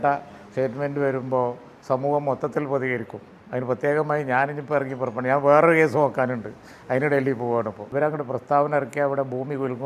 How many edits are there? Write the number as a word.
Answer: one